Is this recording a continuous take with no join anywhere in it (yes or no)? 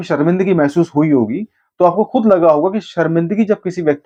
yes